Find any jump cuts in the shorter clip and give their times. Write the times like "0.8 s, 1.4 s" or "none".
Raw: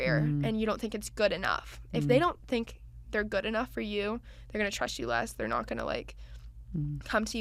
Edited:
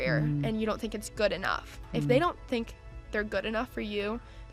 none